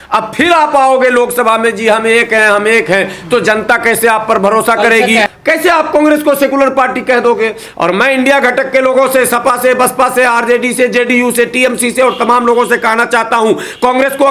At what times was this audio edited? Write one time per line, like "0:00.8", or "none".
0:05.3